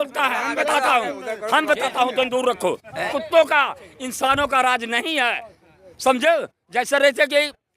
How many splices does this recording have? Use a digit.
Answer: 1